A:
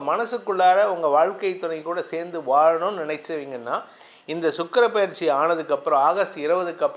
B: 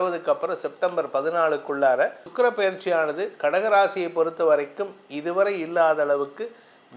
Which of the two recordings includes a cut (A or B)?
B